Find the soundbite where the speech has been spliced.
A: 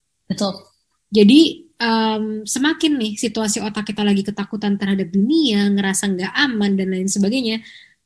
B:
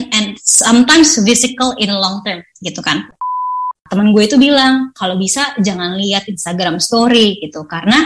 B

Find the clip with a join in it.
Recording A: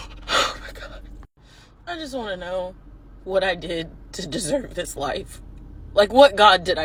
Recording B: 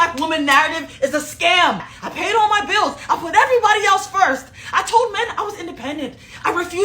B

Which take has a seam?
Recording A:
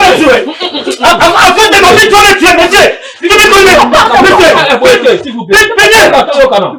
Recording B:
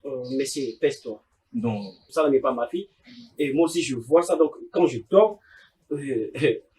B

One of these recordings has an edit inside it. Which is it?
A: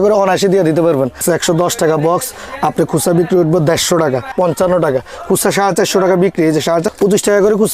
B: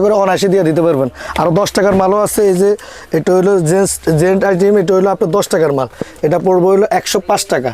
A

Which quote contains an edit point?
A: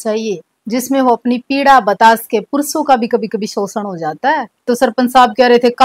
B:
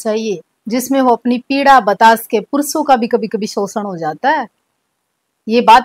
A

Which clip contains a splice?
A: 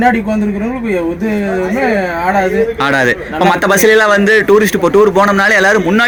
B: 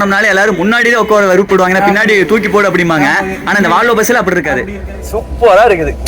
B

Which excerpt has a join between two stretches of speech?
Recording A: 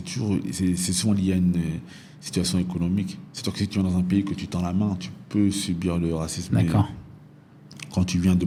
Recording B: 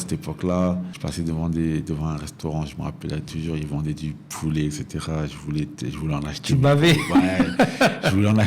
B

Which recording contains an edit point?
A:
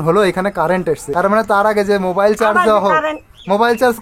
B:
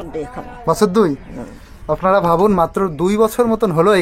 A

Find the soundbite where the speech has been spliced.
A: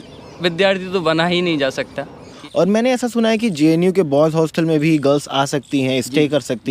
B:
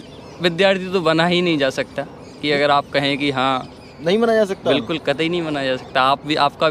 A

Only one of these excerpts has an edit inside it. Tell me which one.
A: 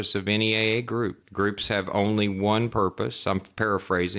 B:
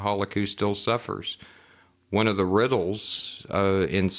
A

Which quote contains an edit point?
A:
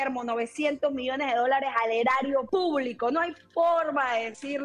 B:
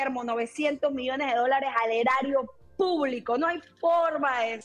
A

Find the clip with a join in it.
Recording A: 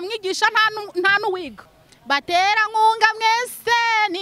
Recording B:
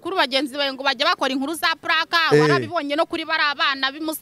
A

